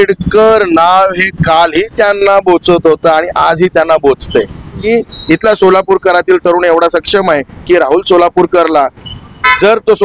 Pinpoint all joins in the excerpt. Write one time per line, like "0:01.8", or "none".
0:04.9